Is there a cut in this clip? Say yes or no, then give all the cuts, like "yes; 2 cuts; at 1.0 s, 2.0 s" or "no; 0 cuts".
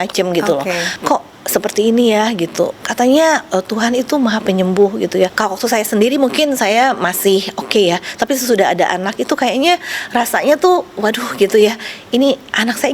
yes; 3 cuts; at 0.9 s, 2.8 s, 5.3 s